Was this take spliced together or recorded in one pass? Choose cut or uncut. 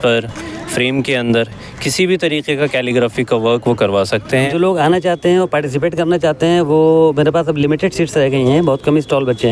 cut